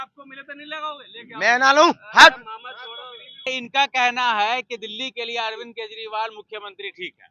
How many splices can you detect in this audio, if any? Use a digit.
1